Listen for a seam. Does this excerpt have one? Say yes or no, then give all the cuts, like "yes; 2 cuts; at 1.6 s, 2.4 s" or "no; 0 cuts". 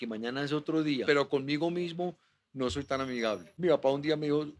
yes; 2 cuts; at 1.0 s, 3.6 s